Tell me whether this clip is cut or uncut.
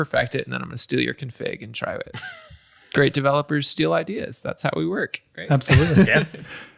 cut